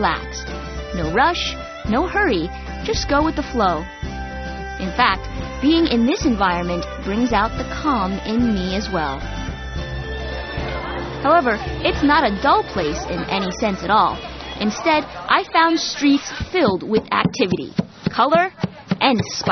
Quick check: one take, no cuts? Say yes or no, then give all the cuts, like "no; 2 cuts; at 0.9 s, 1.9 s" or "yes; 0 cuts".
yes; 0 cuts